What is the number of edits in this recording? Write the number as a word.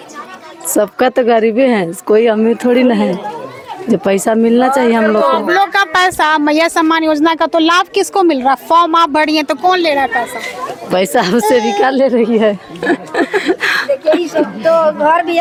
zero